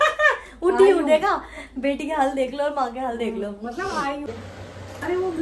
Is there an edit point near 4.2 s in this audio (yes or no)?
yes